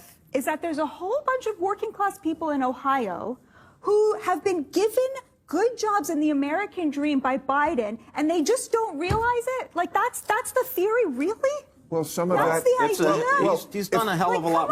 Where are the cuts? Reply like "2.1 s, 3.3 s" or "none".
none